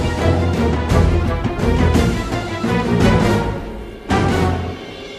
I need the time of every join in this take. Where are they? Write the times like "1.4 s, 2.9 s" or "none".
none